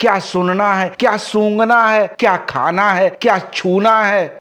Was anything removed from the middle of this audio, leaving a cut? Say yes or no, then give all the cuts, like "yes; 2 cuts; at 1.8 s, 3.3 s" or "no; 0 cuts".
no; 0 cuts